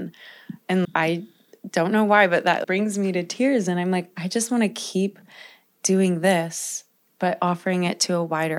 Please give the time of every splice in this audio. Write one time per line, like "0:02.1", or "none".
0:00.9
0:02.6